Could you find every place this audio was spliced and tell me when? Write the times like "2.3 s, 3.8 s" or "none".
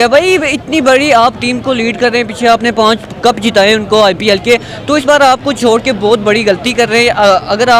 none